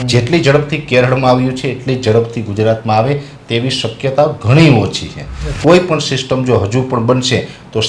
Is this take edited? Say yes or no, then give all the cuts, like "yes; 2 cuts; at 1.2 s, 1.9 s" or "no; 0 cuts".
yes; 1 cut; at 5.4 s